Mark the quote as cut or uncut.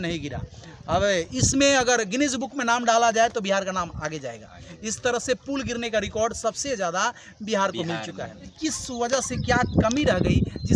cut